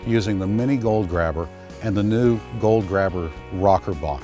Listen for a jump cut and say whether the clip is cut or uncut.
uncut